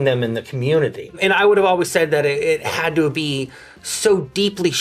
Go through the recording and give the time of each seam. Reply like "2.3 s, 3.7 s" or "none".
1.2 s